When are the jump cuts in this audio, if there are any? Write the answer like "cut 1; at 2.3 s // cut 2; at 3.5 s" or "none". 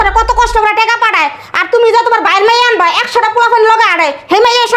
none